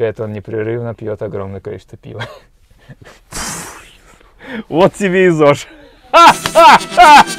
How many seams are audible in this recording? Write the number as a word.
zero